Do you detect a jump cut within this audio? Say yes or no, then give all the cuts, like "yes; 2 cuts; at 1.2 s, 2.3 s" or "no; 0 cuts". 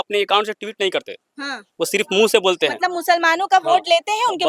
no; 0 cuts